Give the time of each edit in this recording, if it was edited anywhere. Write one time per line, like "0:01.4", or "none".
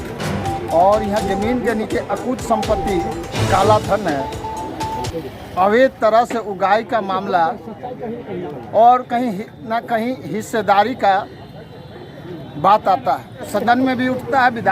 0:13.5